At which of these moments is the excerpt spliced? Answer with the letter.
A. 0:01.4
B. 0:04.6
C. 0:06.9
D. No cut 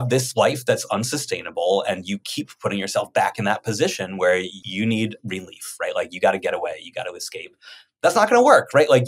B